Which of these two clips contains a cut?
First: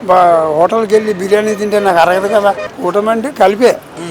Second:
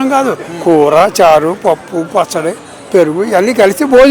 first; 1 cut; at 2.7 s

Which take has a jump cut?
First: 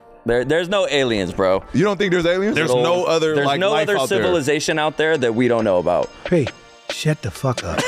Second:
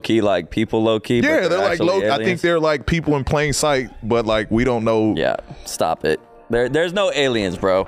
first; 1 cut; at 2.6 s

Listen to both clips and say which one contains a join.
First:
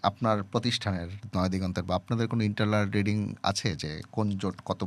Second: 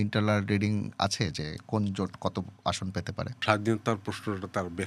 second; 1 cut; at 3.3 s

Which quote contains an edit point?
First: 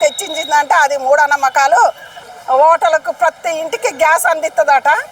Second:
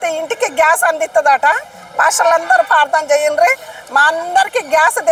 first; 1 cut; at 2.2 s

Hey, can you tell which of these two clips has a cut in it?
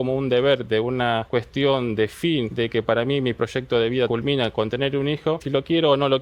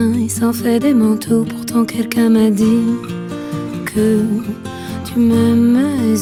first; 4 cuts; at 1.2 s, 2.5 s, 4.1 s, 5.4 s

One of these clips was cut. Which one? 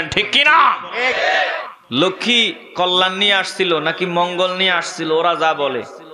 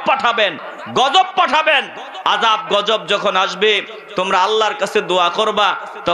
first; 1 cut; at 1.7 s

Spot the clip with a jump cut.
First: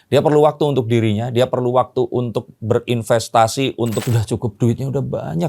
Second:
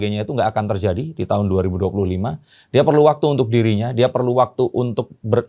first; 1 cut; at 4.0 s

